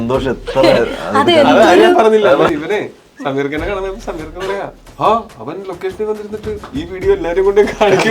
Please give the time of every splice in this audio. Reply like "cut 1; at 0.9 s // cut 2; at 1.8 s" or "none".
cut 1; at 2.5 s